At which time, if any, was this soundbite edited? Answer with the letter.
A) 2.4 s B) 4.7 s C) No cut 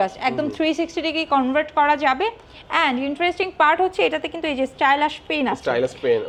C